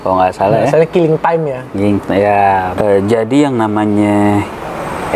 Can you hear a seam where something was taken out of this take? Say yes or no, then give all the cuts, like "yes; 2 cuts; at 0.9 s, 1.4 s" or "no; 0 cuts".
yes; 1 cut; at 2.8 s